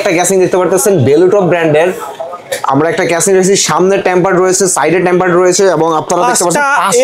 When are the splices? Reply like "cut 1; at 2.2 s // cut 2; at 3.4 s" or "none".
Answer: none